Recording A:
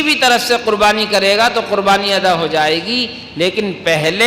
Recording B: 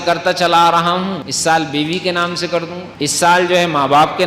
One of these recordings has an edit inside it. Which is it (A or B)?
B